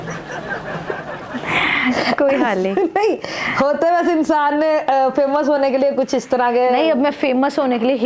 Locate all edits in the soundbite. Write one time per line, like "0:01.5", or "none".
none

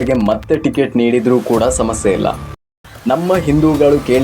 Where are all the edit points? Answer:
0:02.7

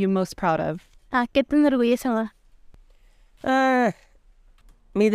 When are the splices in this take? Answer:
0:00.9

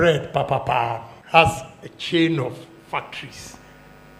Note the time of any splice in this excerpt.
0:01.1

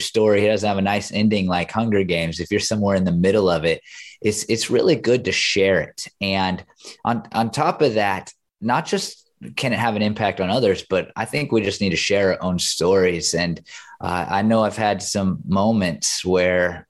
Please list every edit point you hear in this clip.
none

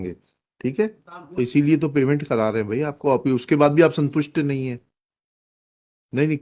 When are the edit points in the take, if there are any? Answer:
0:01.1

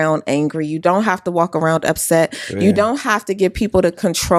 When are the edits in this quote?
none

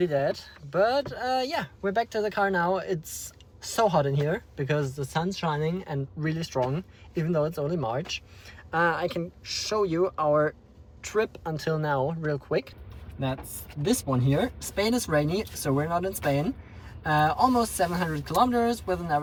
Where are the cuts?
none

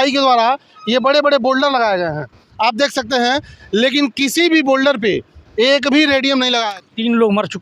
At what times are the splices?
0:06.7

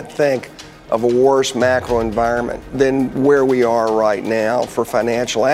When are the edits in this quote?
0:02.7

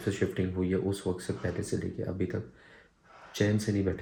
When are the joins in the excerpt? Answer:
none

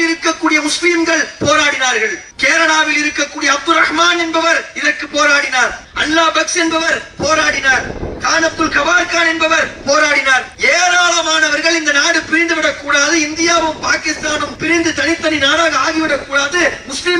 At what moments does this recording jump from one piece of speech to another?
0:02.3
0:05.9
0:10.5
0:14.5

